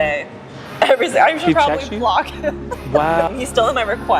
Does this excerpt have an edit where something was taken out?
yes; 1 cut; at 3.3 s

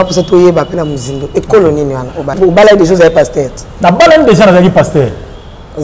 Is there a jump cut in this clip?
yes; 1 cut; at 2.3 s

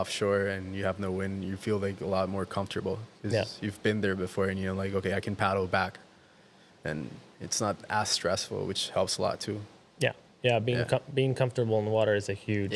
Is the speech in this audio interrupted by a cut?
no; 0 cuts

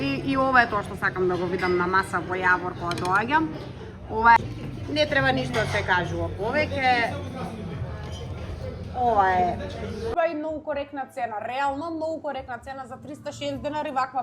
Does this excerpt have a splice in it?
yes; 2 cuts; at 4.4 s, 10.1 s

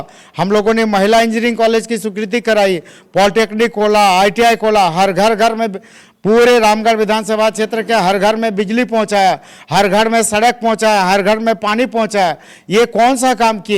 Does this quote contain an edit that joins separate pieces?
no; 0 cuts

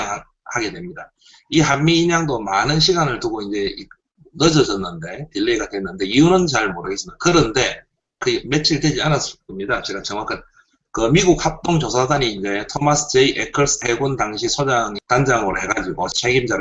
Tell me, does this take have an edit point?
no; 0 cuts

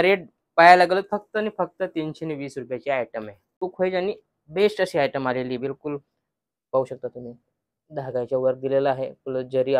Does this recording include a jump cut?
yes; 1 cut; at 3.6 s

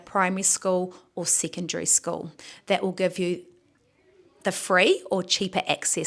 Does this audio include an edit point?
no; 0 cuts

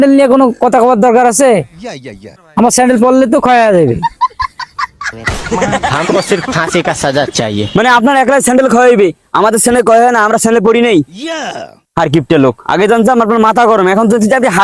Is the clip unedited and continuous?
yes; 0 cuts

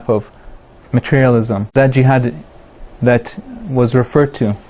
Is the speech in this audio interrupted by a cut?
no; 0 cuts

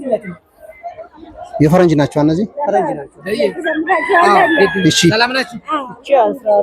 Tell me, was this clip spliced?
no; 0 cuts

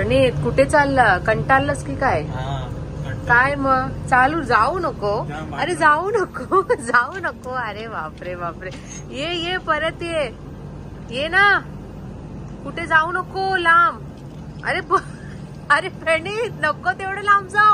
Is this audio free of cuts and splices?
yes; 0 cuts

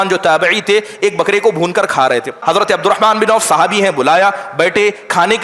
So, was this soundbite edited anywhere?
yes; 1 cut; at 2.4 s

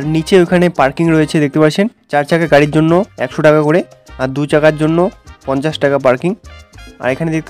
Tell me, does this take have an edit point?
no; 0 cuts

